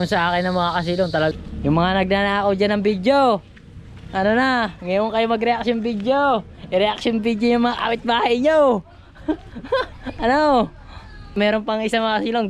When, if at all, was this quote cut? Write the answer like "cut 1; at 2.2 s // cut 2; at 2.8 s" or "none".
cut 1; at 1.3 s // cut 2; at 11.4 s